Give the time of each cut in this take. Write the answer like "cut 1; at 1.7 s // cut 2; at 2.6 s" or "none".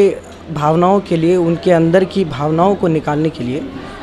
none